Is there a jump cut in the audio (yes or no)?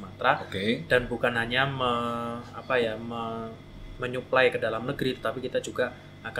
no